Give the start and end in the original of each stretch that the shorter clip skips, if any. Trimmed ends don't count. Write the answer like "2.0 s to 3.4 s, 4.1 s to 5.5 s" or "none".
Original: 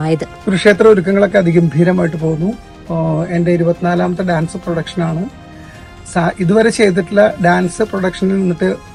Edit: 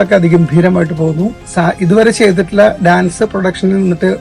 2.6 s to 6.0 s